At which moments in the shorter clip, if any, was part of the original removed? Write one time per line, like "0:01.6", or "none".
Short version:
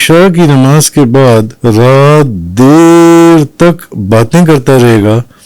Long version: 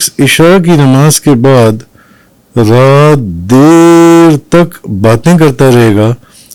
0:01.5